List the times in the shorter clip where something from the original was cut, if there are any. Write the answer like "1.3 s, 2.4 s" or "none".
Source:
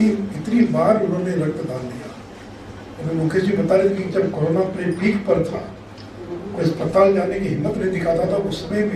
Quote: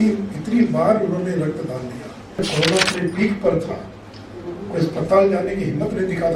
2.4 s